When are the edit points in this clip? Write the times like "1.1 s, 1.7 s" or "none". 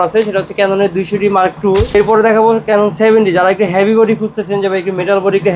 1.9 s